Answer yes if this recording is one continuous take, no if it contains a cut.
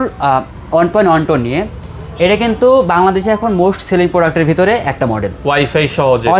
yes